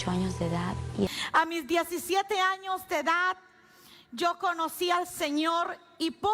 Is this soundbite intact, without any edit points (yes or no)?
no